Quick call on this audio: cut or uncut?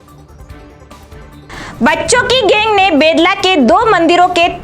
cut